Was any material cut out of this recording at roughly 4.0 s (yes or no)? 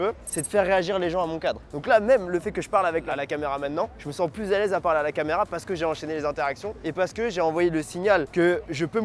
yes